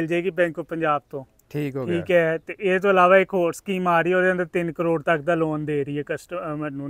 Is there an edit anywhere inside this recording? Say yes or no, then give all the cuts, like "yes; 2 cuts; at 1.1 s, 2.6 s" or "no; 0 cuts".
no; 0 cuts